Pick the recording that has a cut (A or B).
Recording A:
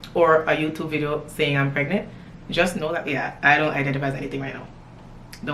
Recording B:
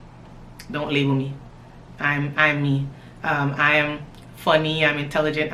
A